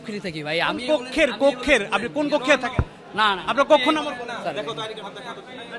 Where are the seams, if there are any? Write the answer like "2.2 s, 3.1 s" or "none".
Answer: none

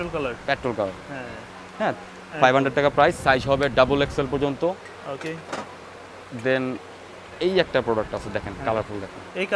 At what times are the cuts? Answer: none

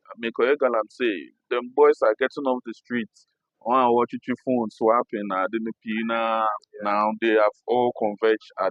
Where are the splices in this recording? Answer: none

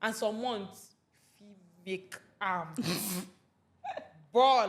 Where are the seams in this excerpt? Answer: none

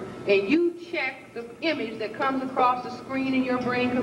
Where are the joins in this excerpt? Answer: none

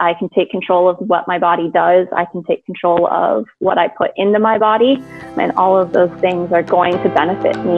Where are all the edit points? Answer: 5.3 s, 6.7 s

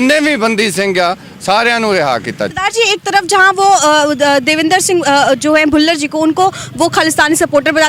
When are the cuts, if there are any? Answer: 2.5 s

